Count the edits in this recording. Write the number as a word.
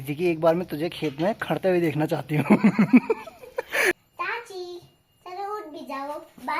one